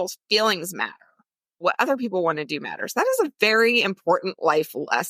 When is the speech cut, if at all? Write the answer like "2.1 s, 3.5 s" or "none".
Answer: none